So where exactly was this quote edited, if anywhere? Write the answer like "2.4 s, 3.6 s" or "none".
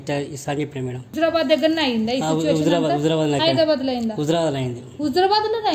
1.0 s